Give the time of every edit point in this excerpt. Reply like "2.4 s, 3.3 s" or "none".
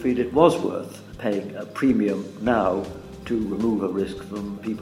none